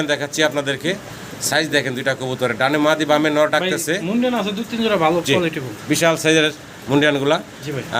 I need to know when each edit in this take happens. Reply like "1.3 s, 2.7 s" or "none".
none